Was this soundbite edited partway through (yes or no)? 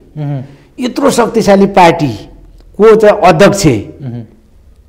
no